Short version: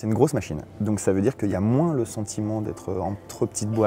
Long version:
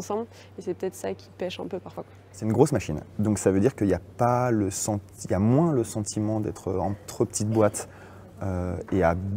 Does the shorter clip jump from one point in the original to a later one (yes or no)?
yes